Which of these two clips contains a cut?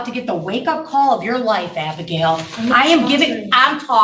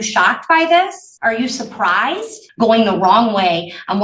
second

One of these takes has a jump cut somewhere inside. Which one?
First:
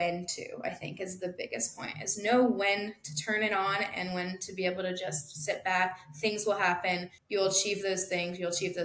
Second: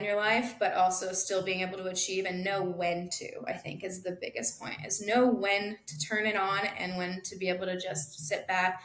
first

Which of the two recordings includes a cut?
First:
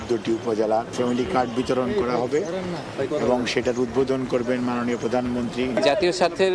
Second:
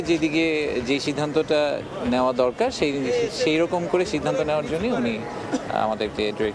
first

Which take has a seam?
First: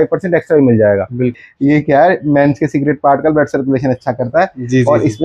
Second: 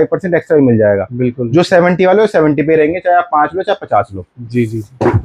first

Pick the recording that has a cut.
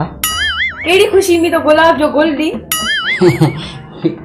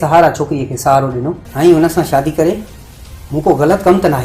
second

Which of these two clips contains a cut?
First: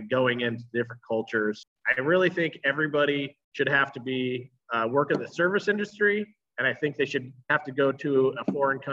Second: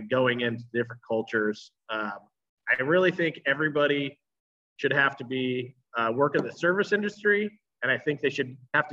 first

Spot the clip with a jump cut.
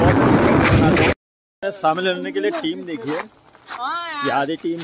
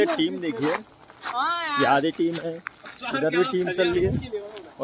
first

